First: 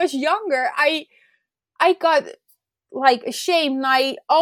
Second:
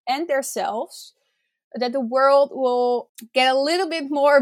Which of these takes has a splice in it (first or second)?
second